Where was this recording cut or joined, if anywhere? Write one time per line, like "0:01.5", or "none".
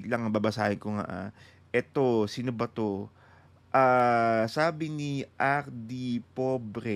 none